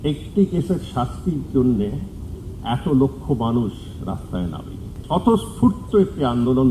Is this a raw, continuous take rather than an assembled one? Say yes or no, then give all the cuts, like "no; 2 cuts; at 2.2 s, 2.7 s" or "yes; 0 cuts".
no; 1 cut; at 4.9 s